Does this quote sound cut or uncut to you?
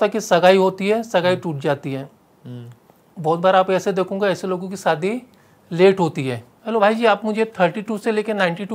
cut